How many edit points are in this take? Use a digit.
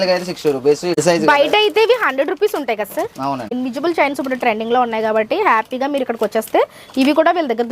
2